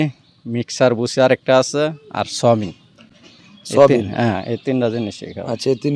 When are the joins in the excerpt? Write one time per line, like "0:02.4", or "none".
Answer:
none